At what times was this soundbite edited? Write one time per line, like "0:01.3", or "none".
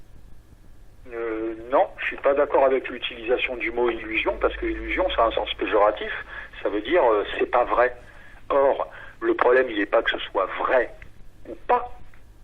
none